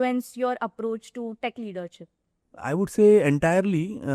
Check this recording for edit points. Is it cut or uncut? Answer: uncut